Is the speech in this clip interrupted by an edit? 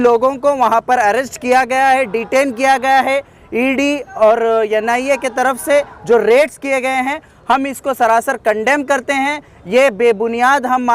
no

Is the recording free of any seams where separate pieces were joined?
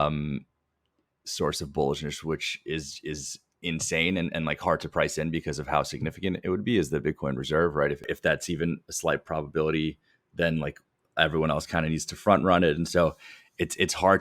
no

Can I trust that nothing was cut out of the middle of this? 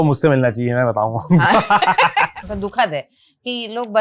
no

